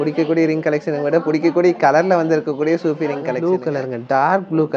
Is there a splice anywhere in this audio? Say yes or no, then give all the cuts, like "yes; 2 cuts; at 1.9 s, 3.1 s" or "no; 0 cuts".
yes; 1 cut; at 3.3 s